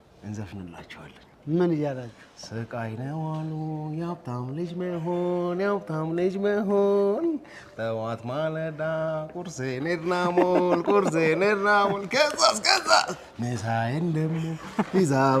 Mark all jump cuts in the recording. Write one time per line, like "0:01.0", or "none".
none

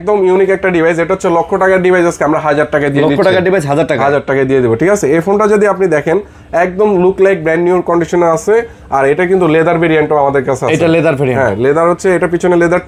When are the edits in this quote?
none

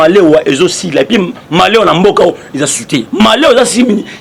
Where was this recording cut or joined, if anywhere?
none

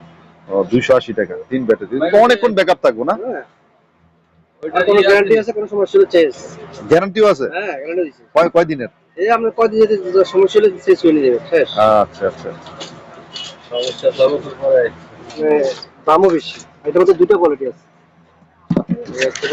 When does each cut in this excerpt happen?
0:15.4

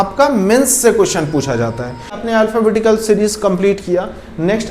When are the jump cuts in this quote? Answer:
0:02.2

